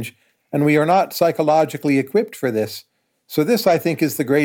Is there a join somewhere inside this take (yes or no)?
no